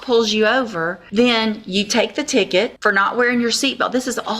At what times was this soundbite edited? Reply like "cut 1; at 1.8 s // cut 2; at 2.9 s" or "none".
cut 1; at 1.0 s // cut 2; at 2.8 s